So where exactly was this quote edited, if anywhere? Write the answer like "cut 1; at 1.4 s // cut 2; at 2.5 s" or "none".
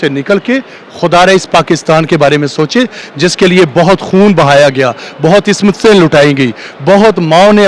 none